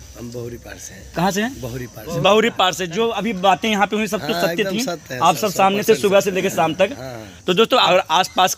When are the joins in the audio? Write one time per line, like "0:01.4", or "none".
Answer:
none